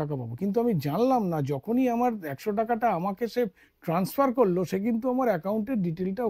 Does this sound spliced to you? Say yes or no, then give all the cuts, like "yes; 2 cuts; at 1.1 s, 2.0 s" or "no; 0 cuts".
no; 0 cuts